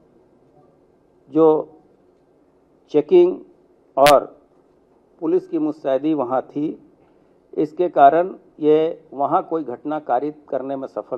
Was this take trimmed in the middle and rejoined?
no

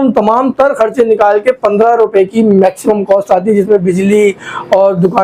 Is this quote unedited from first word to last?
yes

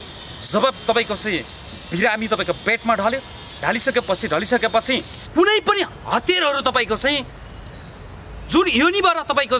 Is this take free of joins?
no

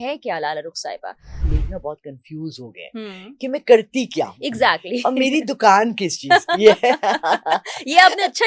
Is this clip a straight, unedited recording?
no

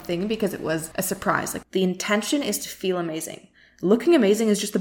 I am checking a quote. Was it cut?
yes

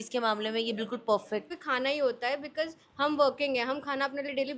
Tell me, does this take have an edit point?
yes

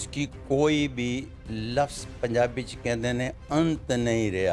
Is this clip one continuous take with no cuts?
yes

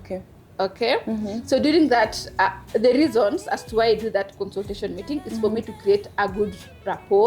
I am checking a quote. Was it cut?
no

